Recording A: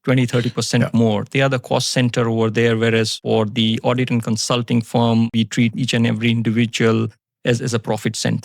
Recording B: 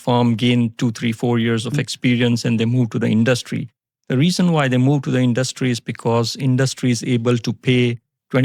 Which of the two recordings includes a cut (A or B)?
A